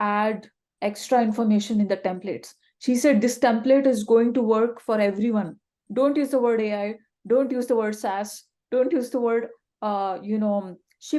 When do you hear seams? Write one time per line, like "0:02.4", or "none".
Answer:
none